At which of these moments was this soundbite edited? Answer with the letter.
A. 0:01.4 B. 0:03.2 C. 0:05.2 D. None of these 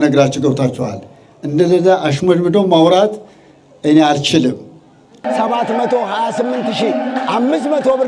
C